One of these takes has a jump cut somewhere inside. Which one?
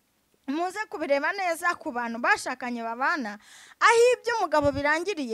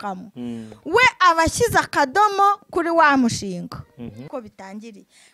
second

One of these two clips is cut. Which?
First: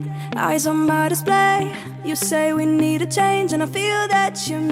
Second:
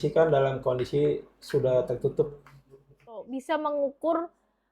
second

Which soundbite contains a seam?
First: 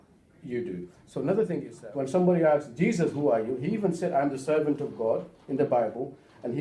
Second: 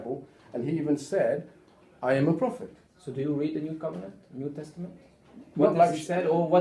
first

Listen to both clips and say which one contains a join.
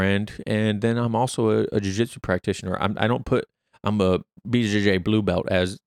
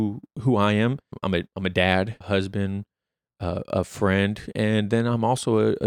second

